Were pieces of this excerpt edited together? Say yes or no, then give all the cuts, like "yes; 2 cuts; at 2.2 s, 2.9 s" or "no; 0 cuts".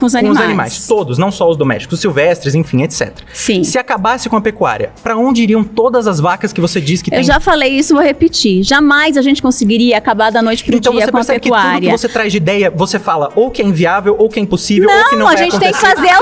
no; 0 cuts